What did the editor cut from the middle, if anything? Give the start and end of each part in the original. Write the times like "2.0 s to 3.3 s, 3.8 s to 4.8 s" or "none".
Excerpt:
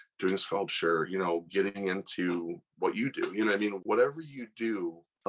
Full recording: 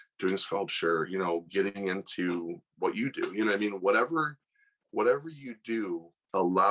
3.8 s to 4.8 s